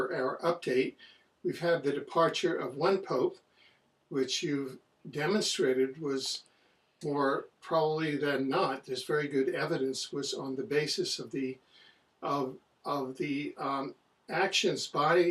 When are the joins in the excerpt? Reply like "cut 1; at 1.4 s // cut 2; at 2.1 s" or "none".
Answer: none